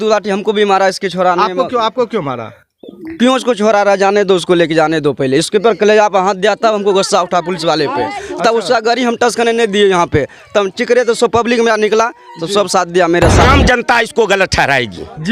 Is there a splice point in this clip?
yes; 1 cut; at 13.5 s

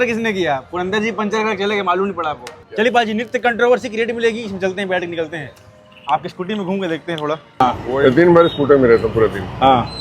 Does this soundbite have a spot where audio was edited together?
yes; 2 cuts; at 2.6 s, 7.6 s

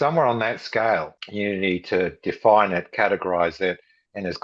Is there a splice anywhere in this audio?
yes; 1 cut; at 1.2 s

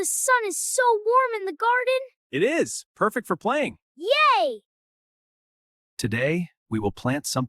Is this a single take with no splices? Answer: no; 2 cuts; at 2.2 s, 3.9 s

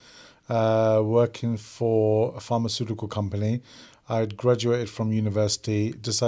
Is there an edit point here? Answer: no; 0 cuts

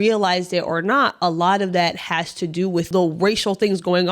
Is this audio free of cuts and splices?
no; 1 cut; at 2.9 s

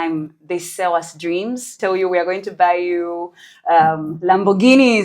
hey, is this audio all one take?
no; 1 cut; at 1.8 s

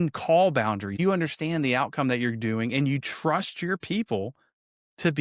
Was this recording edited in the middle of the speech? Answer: yes; 1 cut; at 0.9 s

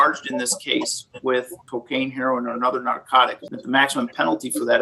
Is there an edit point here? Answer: yes; 2 cuts; at 1.6 s, 3.4 s

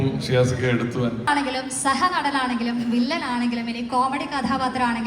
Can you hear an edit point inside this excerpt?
yes; 1 cut; at 1.3 s

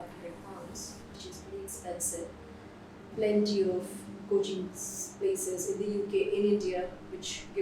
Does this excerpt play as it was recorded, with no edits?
no; 1 cut; at 3.0 s

